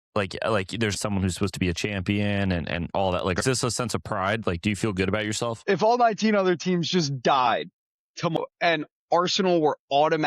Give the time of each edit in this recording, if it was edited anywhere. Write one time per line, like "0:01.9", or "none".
0:00.9
0:03.4
0:05.6
0:08.4